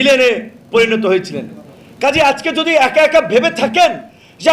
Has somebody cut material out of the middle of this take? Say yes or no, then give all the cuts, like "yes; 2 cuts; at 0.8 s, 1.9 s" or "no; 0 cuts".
no; 0 cuts